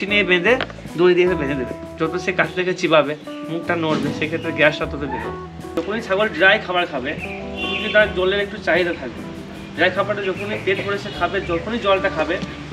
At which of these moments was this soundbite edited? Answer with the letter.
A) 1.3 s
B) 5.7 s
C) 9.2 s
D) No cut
B